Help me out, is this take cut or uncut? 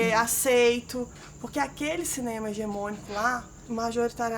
cut